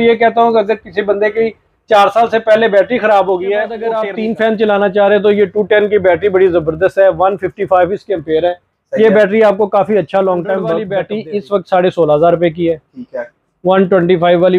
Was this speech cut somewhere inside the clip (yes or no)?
yes